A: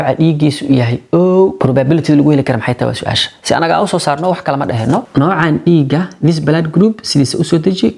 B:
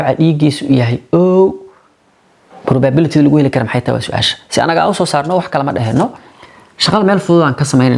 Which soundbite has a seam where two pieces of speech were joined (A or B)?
A